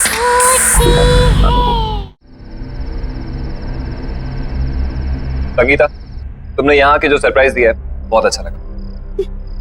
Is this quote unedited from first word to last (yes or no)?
no